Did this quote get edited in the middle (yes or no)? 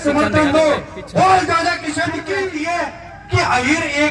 yes